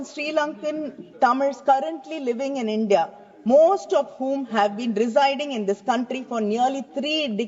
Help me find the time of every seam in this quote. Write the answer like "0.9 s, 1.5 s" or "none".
none